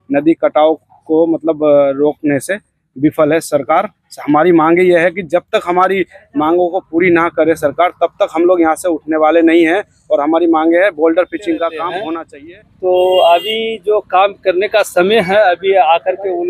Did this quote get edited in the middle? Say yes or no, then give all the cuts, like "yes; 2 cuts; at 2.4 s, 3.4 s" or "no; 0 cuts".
yes; 1 cut; at 12.2 s